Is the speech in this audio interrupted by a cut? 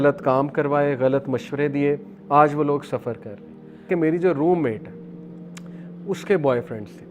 yes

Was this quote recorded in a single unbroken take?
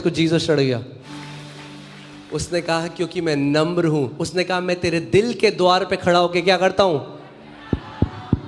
no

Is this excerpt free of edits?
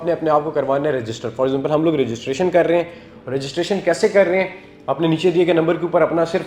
yes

